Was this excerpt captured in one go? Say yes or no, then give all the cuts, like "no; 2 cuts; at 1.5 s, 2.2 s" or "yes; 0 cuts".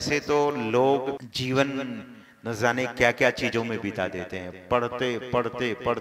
no; 1 cut; at 1.3 s